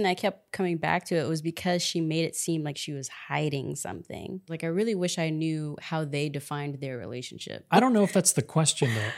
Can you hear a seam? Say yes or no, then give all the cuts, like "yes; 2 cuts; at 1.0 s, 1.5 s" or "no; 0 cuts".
yes; 2 cuts; at 4.5 s, 7.7 s